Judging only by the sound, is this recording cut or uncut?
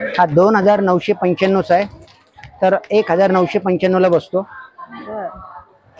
uncut